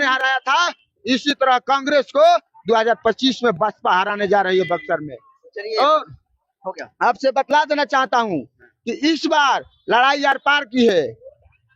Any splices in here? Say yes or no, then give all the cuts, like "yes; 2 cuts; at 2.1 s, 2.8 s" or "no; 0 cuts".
no; 0 cuts